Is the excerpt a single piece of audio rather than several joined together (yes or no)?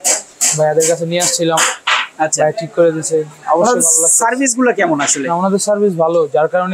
yes